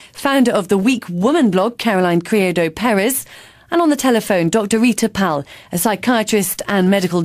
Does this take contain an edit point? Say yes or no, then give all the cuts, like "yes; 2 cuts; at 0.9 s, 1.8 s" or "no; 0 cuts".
no; 0 cuts